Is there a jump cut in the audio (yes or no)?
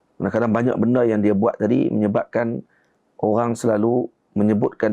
no